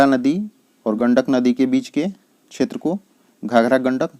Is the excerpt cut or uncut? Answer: cut